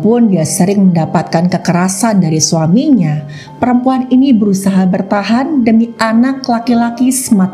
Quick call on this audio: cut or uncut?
uncut